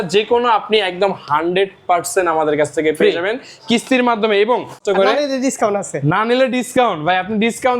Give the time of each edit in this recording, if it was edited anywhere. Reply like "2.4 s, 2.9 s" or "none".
4.8 s